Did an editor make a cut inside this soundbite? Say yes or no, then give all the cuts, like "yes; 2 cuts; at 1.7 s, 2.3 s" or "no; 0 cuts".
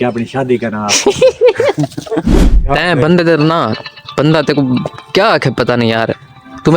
yes; 1 cut; at 2.3 s